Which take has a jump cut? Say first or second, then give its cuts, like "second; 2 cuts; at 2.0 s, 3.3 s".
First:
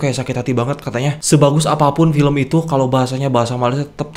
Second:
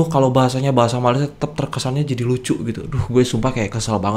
first; 1 cut; at 1.2 s